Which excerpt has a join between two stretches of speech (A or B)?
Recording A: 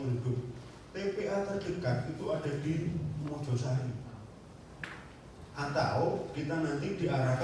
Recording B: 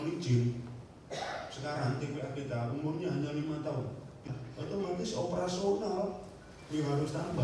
B